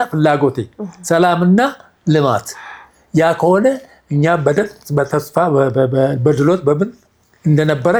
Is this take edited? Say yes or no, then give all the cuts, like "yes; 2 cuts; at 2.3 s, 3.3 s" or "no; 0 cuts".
no; 0 cuts